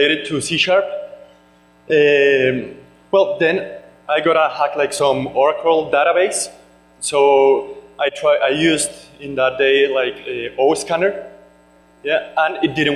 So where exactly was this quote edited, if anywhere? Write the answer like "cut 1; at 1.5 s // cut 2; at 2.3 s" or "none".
cut 1; at 7.6 s